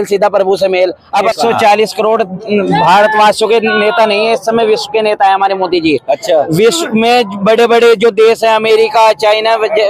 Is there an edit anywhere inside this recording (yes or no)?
yes